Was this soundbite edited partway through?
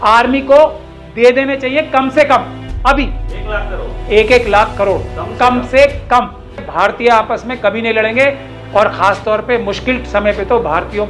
yes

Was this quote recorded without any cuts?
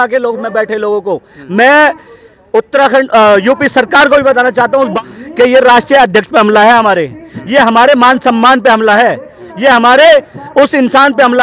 no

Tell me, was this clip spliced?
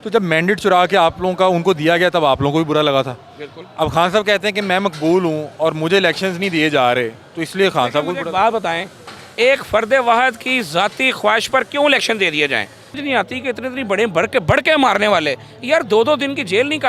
yes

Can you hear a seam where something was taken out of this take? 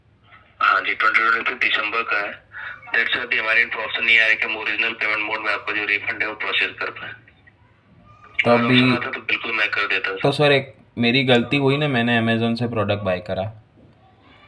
no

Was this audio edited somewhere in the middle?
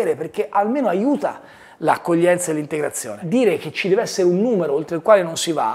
yes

